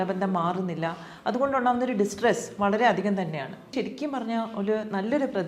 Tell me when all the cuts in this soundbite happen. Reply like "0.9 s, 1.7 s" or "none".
3.7 s